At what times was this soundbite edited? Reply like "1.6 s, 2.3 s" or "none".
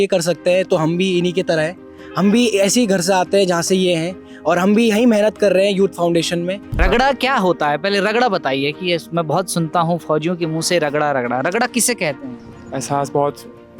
6.8 s, 12.3 s

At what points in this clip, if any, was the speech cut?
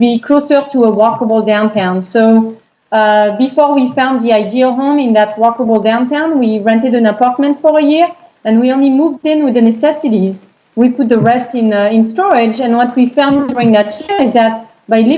6.5 s

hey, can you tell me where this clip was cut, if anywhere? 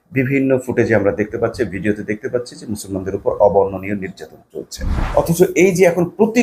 4.9 s

